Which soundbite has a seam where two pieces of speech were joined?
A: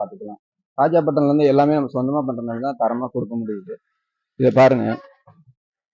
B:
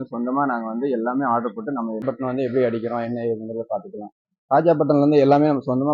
B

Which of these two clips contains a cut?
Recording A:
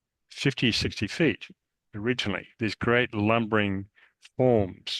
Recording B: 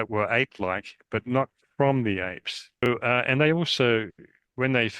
B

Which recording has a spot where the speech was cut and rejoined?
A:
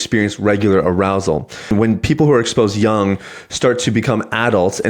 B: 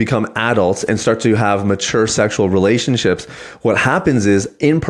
A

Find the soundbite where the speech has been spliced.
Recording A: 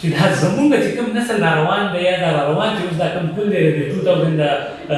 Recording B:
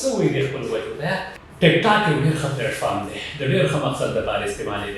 B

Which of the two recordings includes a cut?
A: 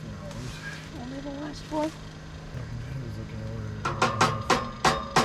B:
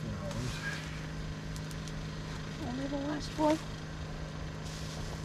A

